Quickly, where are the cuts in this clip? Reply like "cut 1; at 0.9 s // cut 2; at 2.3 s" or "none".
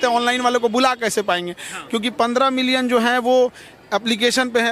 none